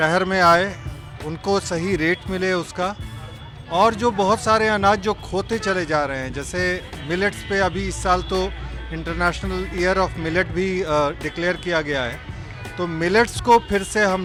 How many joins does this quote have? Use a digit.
0